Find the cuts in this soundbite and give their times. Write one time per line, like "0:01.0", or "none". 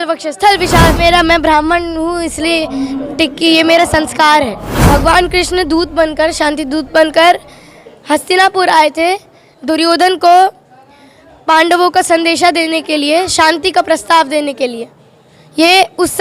0:01.0
0:04.7